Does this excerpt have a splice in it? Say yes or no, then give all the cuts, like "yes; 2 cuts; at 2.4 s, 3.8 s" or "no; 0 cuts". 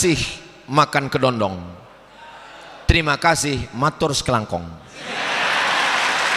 no; 0 cuts